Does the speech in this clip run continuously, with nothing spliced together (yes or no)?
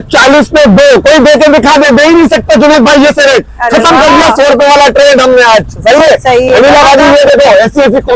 yes